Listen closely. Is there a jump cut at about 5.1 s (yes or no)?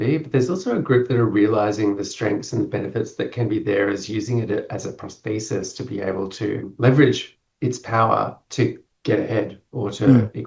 no